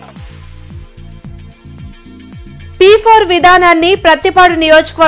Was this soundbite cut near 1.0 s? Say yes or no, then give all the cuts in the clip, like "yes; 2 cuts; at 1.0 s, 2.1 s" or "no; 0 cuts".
yes; 1 cut; at 1.0 s